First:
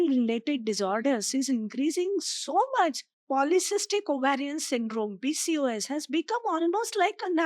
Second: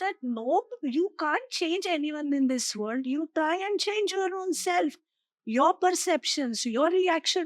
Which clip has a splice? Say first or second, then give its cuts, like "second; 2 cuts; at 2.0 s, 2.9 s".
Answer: first; 1 cut; at 3.1 s